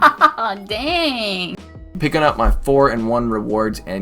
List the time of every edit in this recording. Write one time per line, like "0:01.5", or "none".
0:01.5